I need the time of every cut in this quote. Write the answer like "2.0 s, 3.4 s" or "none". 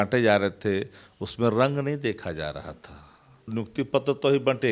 3.5 s